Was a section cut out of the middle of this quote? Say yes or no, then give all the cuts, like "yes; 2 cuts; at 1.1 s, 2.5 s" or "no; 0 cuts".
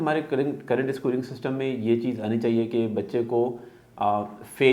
no; 0 cuts